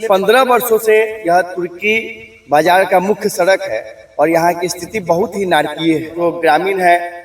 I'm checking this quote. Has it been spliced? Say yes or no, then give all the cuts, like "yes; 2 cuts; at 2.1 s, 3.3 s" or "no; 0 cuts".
yes; 1 cut; at 6.1 s